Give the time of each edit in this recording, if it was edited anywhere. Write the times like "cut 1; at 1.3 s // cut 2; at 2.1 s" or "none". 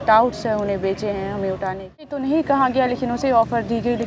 cut 1; at 2.1 s